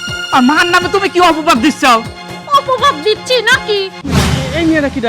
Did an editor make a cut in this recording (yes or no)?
yes